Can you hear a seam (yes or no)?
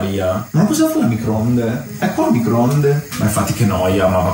no